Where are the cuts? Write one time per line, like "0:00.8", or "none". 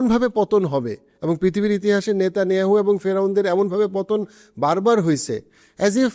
none

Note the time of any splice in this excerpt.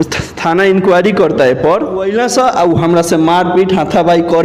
0:02.1

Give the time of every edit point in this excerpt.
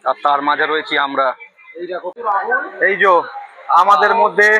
0:02.1

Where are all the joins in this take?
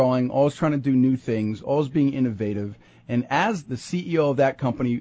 0:03.8

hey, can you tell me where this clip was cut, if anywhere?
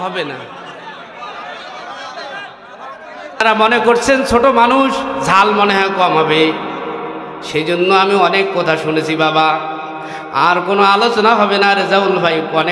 0:03.4

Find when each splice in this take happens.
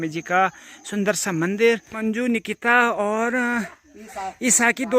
0:02.0

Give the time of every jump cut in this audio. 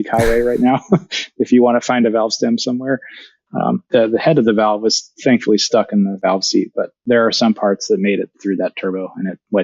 0:07.0
0:08.4

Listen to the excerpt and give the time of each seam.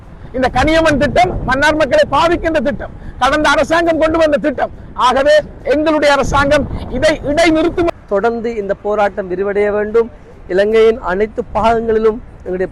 0:07.9

